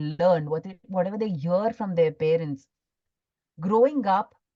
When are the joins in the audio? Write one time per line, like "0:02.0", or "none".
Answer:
none